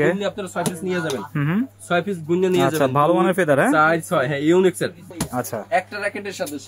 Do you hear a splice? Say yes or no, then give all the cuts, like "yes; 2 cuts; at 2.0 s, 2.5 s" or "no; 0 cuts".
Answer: yes; 1 cut; at 5.1 s